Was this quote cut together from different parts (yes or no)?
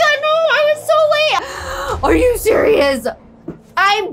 yes